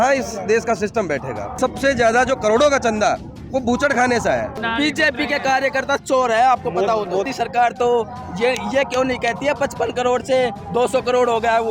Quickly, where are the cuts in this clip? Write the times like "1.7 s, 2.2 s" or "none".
1.5 s, 4.6 s, 7.3 s